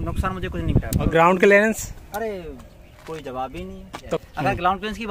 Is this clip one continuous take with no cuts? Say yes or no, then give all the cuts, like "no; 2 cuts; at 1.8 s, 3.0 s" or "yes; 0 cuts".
no; 2 cuts; at 1.1 s, 4.2 s